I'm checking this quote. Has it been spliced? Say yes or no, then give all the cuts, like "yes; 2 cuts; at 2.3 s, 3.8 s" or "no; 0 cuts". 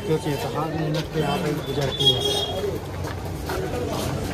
no; 0 cuts